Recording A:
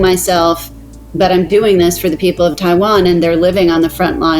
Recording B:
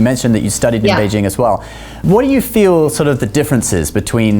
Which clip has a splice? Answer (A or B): B